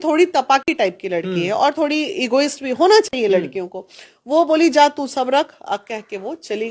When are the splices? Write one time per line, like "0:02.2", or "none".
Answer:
none